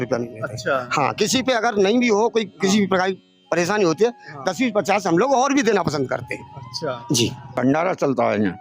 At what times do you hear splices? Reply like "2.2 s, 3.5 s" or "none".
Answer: 7.6 s